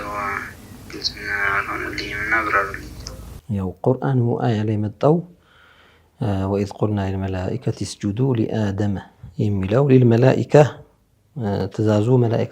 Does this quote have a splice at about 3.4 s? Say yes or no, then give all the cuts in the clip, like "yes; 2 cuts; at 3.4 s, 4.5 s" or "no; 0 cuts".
no; 0 cuts